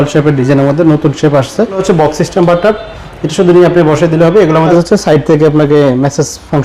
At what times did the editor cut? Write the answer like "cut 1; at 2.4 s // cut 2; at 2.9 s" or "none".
cut 1; at 1.8 s // cut 2; at 4.7 s